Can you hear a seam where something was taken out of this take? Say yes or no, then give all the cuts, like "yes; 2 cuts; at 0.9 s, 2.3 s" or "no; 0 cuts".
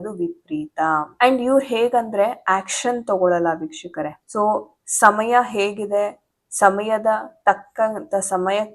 no; 0 cuts